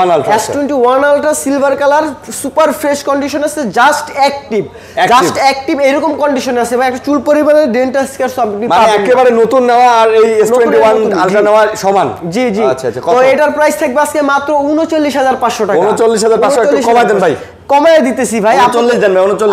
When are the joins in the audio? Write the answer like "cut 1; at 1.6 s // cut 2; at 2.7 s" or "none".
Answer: none